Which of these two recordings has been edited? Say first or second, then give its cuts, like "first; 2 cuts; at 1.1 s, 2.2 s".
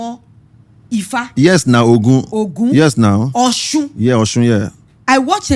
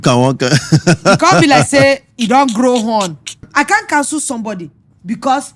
second; 1 cut; at 3.5 s